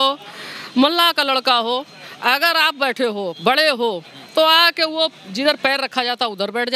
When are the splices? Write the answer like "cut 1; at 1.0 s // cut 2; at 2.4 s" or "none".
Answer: none